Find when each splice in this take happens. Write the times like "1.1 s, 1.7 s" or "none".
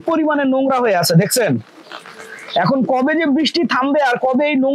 none

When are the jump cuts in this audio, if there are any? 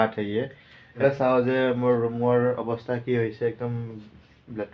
1.0 s

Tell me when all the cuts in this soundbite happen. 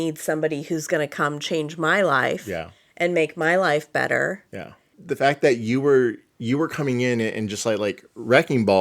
5.0 s

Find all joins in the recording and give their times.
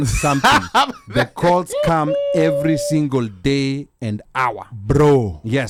none

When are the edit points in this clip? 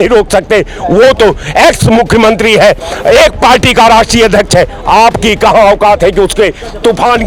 none

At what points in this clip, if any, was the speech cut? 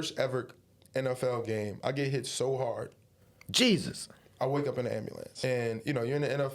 5.3 s

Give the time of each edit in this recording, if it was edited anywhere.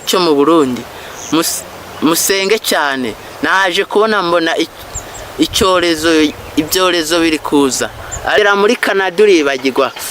8.4 s

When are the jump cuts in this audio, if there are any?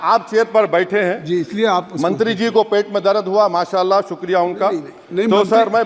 none

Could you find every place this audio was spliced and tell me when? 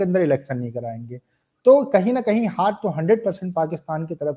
none

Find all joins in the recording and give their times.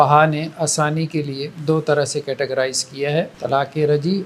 1.5 s, 3.3 s

